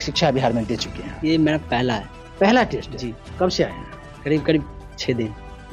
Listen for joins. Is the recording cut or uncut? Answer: uncut